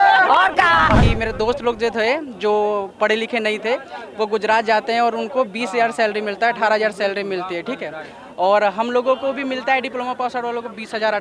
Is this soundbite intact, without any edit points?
no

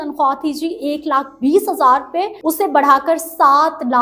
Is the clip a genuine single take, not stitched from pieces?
no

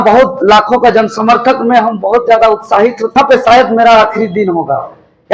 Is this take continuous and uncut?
no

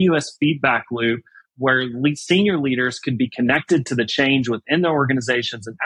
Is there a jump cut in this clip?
yes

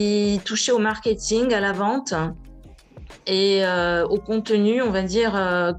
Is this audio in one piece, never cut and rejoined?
yes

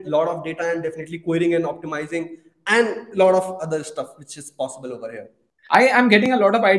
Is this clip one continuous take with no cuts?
no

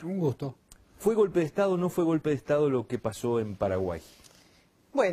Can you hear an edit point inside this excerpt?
yes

